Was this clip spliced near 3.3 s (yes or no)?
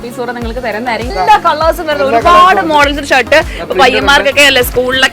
no